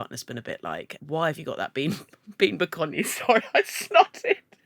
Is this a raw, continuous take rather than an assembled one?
no; 1 cut; at 0.9 s

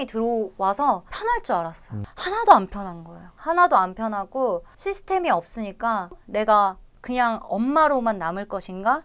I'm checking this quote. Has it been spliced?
yes; 1 cut; at 6.2 s

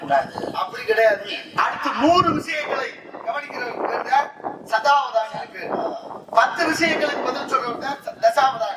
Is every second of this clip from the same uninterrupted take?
no; 1 cut; at 1.5 s

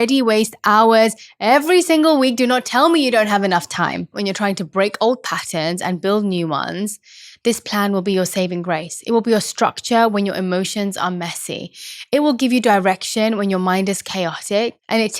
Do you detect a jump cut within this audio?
yes; 1 cut; at 4.1 s

